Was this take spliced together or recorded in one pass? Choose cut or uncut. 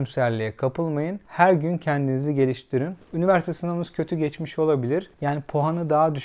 cut